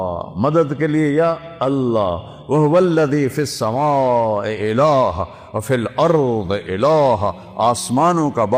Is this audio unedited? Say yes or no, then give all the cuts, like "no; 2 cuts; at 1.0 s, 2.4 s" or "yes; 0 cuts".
yes; 0 cuts